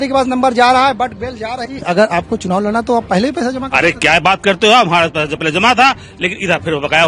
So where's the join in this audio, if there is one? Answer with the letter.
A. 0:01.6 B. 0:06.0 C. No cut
A